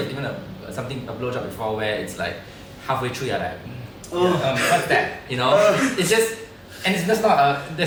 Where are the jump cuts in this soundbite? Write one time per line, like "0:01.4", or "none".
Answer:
none